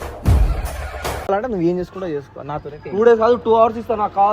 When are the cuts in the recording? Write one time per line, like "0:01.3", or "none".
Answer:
0:01.3